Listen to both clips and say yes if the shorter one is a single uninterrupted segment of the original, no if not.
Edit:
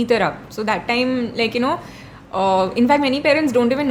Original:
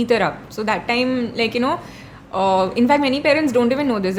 yes